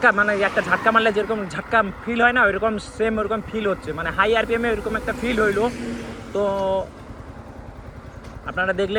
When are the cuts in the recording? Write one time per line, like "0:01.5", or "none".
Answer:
none